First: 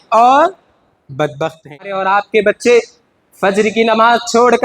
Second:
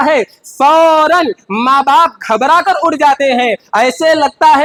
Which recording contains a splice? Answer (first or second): first